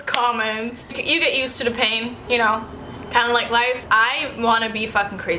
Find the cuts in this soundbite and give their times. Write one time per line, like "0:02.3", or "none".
0:00.9
0:02.2
0:03.8